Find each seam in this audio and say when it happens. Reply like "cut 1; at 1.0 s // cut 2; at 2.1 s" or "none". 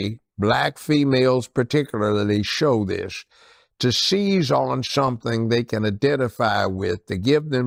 none